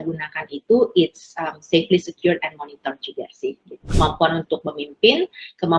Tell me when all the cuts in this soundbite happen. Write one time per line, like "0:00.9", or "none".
0:03.9